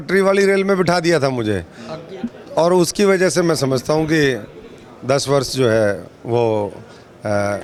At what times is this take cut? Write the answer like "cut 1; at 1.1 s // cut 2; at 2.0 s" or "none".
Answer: none